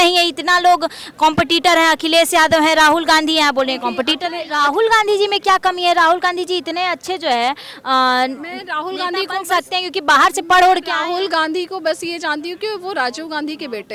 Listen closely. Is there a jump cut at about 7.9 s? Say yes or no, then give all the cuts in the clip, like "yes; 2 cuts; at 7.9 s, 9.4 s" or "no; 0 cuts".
no; 1 cut; at 4.4 s